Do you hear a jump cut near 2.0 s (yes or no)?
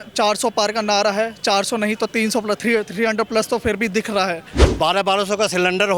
no